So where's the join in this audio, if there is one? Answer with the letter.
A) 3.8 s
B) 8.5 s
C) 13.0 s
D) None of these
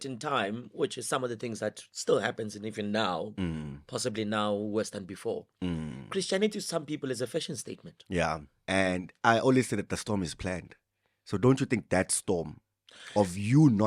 B